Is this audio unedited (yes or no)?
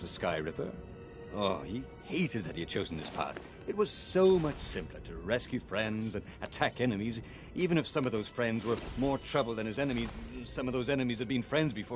yes